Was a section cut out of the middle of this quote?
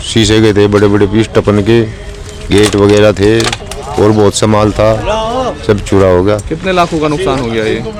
no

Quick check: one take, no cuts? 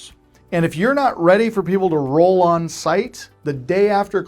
yes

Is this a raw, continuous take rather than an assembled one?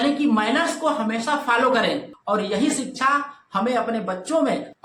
yes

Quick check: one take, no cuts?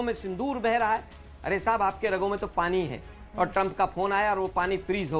yes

